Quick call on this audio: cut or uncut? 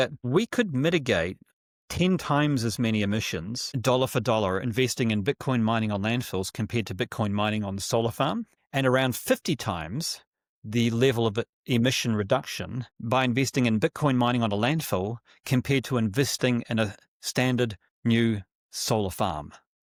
uncut